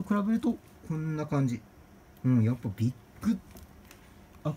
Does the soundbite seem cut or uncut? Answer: uncut